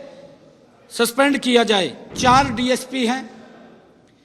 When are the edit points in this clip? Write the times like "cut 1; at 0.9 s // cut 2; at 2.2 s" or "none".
cut 1; at 2.0 s